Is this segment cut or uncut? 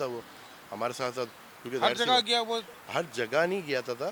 uncut